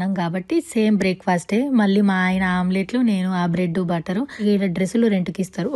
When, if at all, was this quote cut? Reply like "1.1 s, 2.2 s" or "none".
4.4 s